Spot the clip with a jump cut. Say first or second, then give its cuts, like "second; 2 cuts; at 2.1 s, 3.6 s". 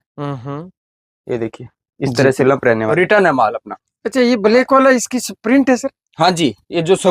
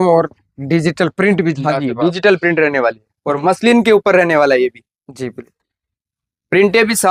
first; 1 cut; at 2.9 s